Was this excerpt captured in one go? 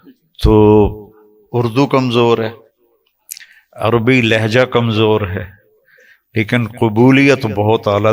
yes; 0 cuts

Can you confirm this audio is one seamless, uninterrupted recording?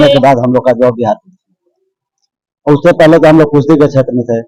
yes; 0 cuts

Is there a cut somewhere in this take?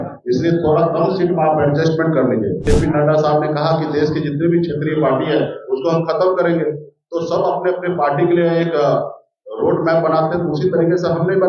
yes; 1 cut; at 2.6 s

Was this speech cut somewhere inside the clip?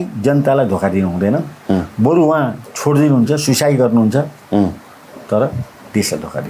no; 0 cuts

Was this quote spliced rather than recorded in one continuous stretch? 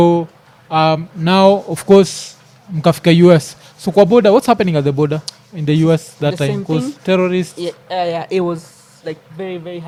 no; 0 cuts

